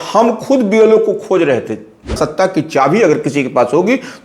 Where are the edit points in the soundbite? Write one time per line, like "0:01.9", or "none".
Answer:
0:02.2